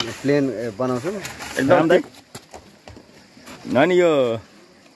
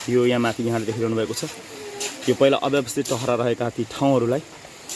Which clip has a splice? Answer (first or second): first